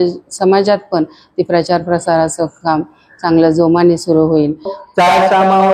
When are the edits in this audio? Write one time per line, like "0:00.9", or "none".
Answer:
0:04.8